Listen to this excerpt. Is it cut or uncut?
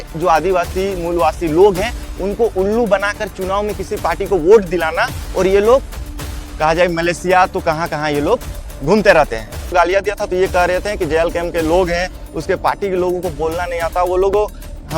cut